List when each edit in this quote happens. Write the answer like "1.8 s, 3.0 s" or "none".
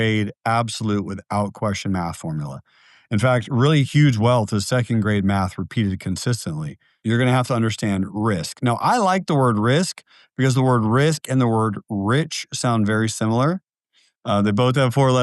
6.9 s